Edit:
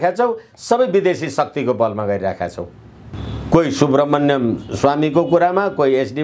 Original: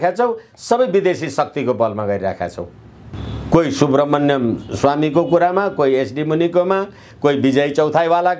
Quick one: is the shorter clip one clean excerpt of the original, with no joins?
yes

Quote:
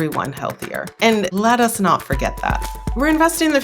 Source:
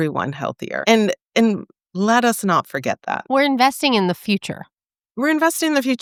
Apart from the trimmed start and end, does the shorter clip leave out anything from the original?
yes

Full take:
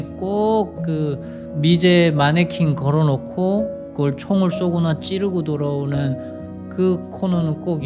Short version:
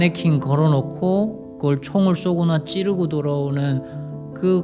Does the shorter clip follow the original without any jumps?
yes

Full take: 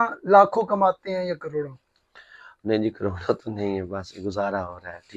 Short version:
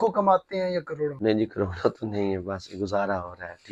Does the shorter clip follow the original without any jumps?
no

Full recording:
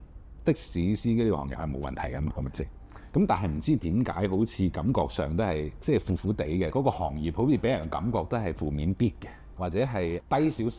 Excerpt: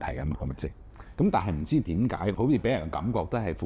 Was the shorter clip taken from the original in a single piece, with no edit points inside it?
no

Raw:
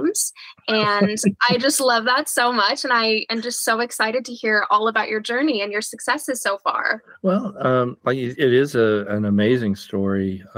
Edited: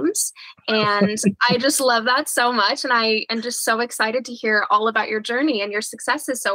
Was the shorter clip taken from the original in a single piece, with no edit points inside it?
yes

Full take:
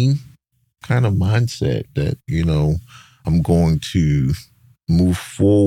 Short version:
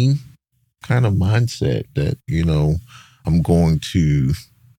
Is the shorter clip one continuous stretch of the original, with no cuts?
yes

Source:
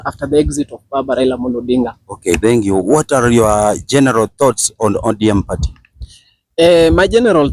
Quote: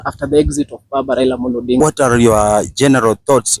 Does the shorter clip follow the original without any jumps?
no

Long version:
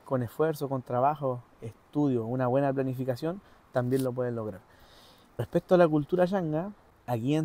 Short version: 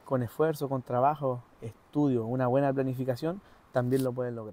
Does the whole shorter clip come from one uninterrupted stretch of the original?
yes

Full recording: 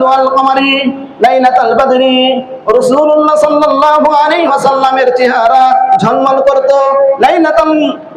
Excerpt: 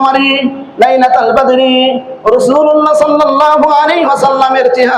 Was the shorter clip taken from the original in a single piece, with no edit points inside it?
yes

